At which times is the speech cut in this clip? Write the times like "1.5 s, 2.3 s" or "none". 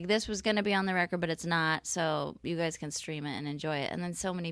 none